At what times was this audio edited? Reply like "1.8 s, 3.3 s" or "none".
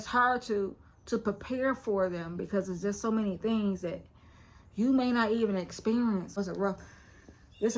6.4 s